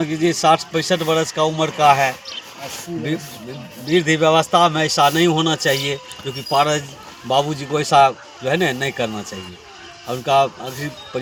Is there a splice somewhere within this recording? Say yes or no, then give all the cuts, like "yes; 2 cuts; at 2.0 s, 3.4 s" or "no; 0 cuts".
no; 0 cuts